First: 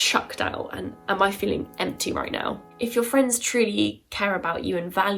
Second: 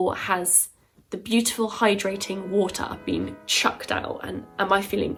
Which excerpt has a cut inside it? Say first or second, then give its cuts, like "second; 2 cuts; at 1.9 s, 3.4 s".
first; 1 cut; at 2.7 s